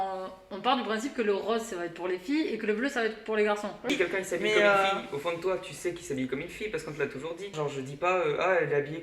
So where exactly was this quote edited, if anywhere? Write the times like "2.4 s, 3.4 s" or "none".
3.9 s, 7.5 s